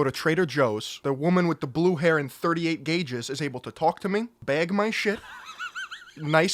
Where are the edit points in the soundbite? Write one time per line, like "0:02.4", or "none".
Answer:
0:00.9
0:04.3